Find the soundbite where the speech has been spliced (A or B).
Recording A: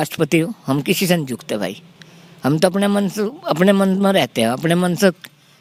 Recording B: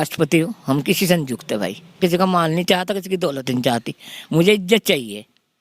B